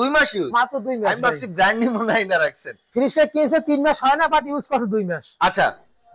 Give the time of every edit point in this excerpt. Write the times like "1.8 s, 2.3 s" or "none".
none